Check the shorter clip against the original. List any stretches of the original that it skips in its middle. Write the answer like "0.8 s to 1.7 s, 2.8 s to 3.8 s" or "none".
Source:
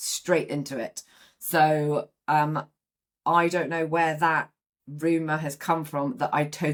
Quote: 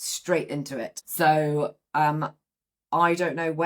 1.0 s to 1.3 s